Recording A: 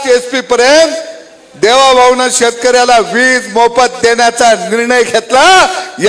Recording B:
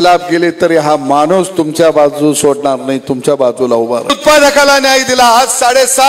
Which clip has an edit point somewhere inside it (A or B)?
B